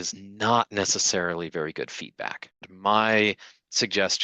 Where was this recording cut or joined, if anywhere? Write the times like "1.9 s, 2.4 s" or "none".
2.7 s